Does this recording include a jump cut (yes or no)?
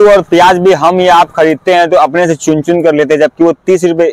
no